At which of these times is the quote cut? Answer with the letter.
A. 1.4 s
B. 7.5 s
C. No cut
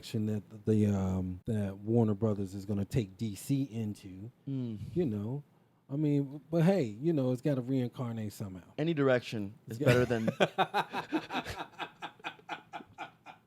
A